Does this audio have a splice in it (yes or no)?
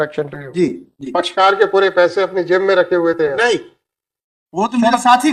no